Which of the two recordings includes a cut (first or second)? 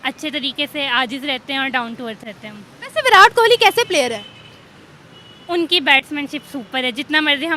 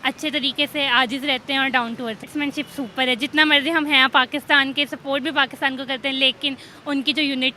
second